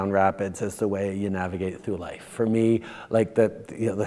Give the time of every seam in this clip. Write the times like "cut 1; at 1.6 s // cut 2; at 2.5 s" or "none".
none